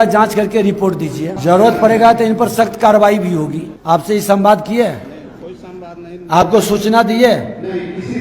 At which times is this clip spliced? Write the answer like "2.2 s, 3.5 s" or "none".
1.3 s, 3.7 s